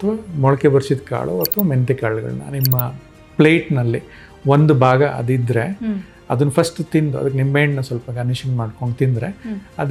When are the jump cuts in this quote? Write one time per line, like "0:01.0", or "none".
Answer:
none